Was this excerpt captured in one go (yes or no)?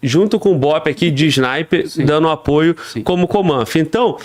yes